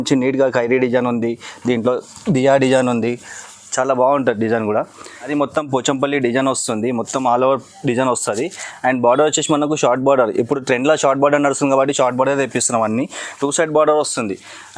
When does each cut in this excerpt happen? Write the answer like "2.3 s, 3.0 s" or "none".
5.3 s